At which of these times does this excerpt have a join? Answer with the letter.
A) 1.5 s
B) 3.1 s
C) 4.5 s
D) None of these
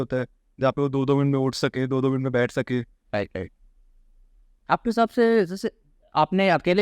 D